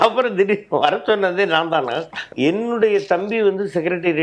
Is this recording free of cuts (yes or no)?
no